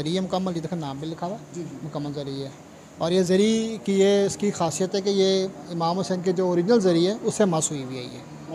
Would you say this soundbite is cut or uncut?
uncut